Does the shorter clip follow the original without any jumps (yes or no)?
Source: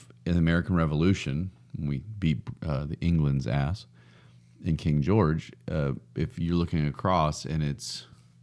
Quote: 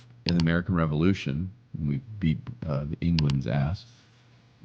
yes